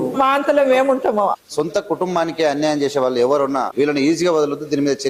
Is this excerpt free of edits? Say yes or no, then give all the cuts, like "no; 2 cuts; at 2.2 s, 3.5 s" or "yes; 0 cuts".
no; 2 cuts; at 1.4 s, 3.7 s